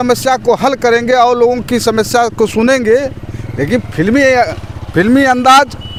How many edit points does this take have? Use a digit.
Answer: 0